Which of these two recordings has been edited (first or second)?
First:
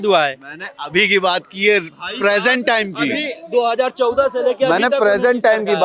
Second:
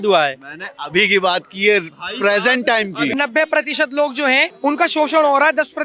second